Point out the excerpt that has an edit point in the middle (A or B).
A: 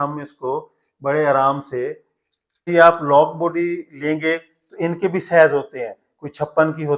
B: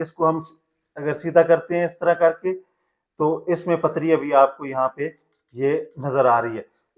A